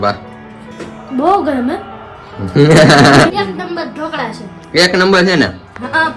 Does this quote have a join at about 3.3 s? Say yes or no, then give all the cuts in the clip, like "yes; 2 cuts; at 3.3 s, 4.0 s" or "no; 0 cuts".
yes; 1 cut; at 3.3 s